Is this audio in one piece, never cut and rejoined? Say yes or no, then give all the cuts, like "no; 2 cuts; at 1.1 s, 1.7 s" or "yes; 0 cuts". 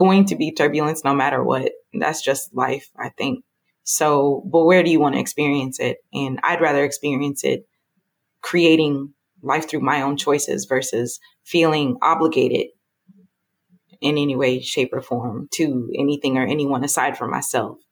yes; 0 cuts